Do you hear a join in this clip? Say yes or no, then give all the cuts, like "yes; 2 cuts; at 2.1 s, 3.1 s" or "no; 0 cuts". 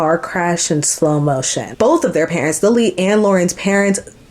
yes; 1 cut; at 1.6 s